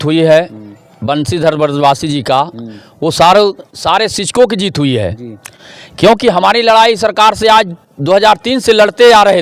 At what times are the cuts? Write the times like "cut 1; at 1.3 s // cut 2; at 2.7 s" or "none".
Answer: none

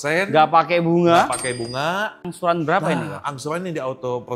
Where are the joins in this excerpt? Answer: cut 1; at 2.3 s

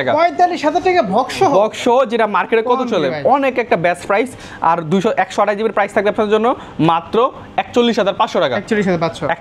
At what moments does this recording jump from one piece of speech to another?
none

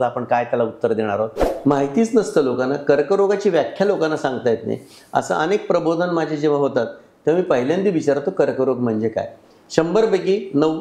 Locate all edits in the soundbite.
cut 1; at 1.5 s

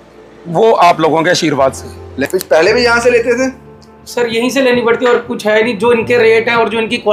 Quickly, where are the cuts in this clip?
cut 1; at 2.2 s

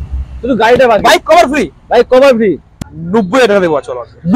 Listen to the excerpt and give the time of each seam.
cut 1; at 2.7 s

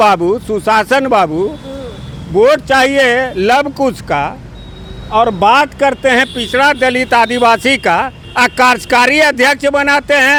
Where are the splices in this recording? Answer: none

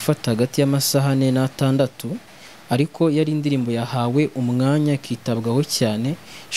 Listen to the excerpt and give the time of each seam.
none

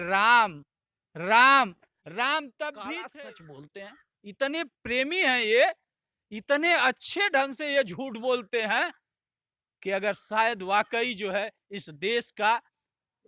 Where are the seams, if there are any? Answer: cut 1; at 3.0 s

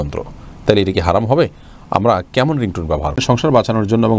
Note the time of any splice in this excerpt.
cut 1; at 3.2 s

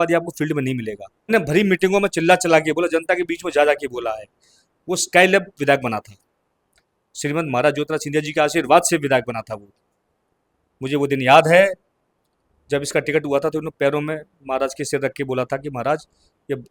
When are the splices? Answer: cut 1; at 1.3 s

